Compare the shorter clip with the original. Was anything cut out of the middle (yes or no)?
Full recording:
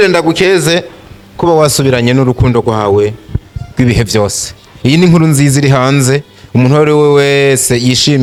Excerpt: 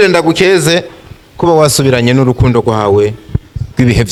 no